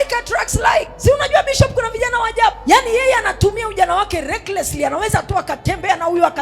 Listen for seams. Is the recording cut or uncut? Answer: cut